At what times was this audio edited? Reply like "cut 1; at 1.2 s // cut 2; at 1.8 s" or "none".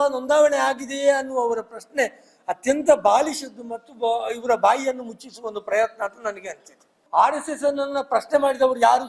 cut 1; at 7.0 s